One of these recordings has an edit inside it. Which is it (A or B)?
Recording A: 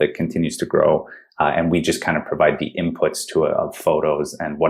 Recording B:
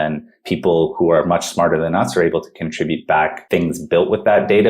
B